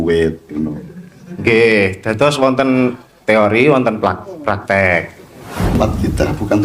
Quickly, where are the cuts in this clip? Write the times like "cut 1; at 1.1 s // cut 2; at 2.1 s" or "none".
cut 1; at 5.7 s